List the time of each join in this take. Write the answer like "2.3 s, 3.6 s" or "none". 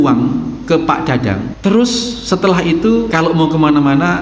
1.5 s, 3.1 s